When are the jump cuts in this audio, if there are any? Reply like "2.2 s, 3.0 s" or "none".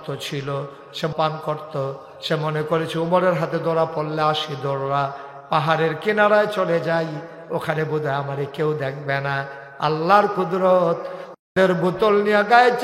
1.1 s

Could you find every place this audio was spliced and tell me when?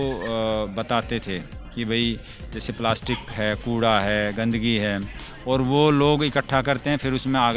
none

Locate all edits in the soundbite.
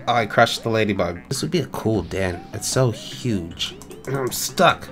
1.3 s, 3.9 s

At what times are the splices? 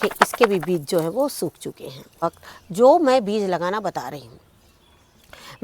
2.2 s

